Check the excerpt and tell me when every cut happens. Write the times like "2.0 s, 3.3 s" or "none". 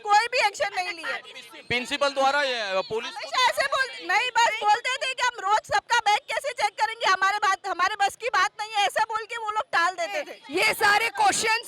10.4 s